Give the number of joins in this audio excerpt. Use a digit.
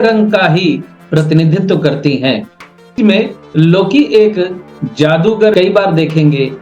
2